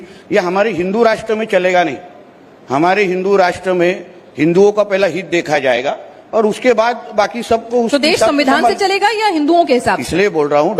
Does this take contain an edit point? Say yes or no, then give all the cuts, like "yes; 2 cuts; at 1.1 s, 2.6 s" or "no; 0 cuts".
no; 0 cuts